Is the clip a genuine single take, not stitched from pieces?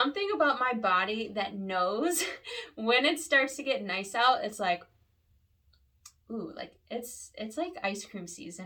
yes; 0 cuts

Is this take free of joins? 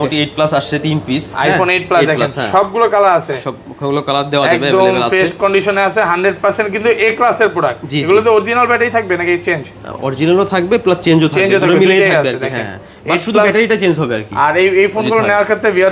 yes; 0 cuts

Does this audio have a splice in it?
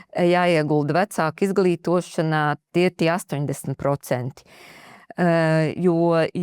no; 0 cuts

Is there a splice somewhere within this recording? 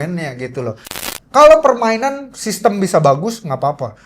yes; 1 cut; at 1.0 s

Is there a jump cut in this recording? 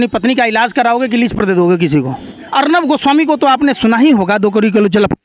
yes; 1 cut; at 2.4 s

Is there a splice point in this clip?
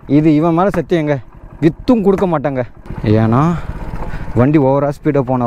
yes; 1 cut; at 2.8 s

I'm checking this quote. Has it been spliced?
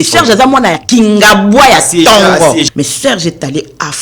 yes; 1 cut; at 2.7 s

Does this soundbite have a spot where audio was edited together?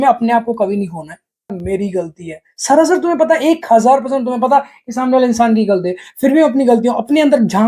yes; 1 cut; at 1.6 s

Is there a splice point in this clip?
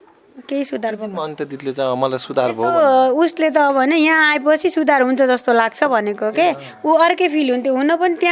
no; 0 cuts

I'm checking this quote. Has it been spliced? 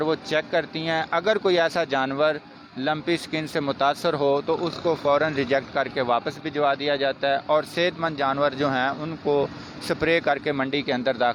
no; 0 cuts

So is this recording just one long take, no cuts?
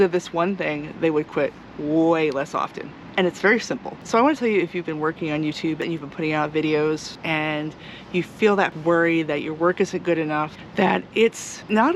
no; 5 cuts; at 3.9 s, 5.8 s, 7.2 s, 8.8 s, 10.6 s

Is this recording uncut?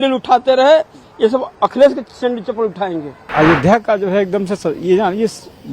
no; 1 cut; at 3.3 s

